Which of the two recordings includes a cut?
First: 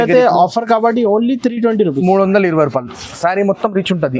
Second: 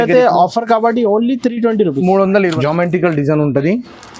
second; 1 cut; at 2.5 s

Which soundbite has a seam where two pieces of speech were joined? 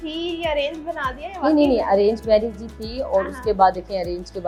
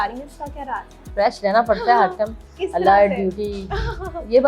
second; 1 cut; at 1.0 s

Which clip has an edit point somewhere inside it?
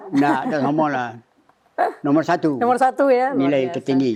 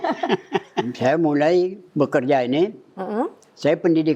second; 2 cuts; at 0.9 s, 1.8 s

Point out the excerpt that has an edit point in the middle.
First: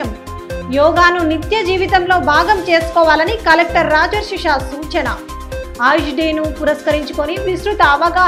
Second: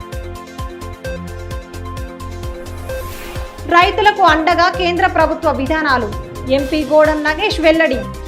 second; 1 cut; at 1.1 s

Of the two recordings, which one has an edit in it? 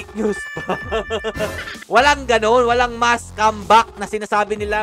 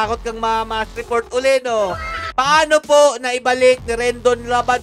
second; 1 cut; at 2.2 s

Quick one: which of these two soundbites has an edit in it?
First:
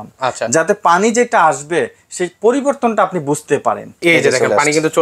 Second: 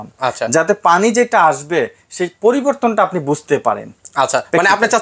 first; 1 cut; at 3.9 s

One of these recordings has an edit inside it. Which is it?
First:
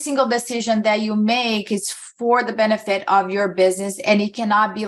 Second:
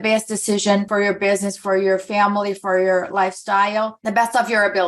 second; 2 cuts; at 0.9 s, 4.0 s

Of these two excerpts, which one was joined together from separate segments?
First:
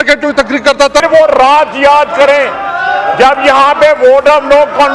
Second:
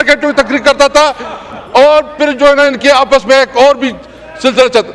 first; 1 cut; at 1.0 s

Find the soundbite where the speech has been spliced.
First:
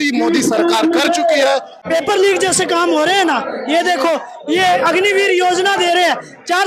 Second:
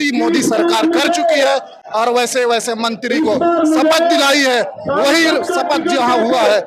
first; 1 cut; at 1.8 s

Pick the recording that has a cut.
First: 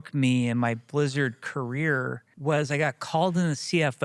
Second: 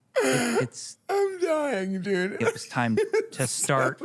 first; 1 cut; at 2.3 s

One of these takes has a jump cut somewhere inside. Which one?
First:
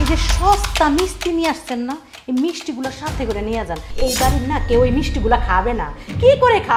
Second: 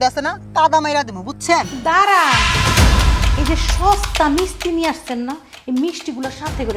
second; 1 cut; at 1.7 s

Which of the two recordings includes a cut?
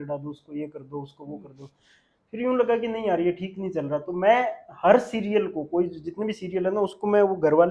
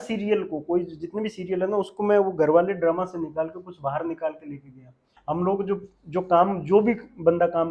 second; 1 cut; at 5.1 s

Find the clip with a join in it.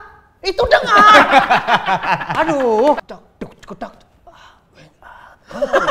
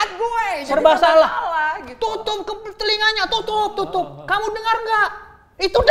first; 1 cut; at 3.0 s

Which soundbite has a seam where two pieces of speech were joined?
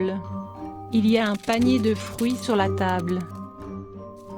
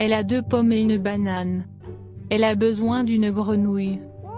first; 1 cut; at 3.3 s

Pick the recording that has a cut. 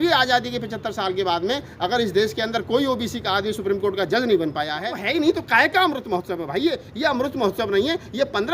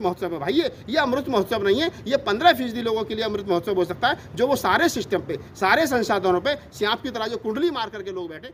first; 1 cut; at 5.0 s

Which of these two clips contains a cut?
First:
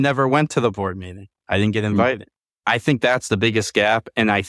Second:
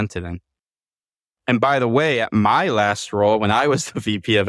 first; 1 cut; at 2.6 s

